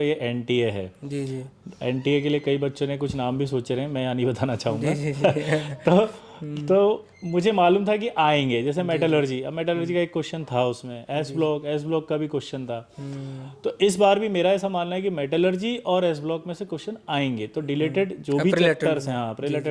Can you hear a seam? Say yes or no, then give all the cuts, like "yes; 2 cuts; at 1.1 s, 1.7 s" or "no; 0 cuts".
no; 0 cuts